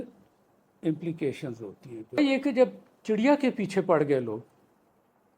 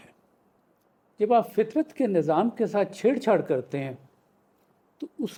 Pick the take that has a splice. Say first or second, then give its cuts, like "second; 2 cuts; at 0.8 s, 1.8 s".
first; 1 cut; at 2.2 s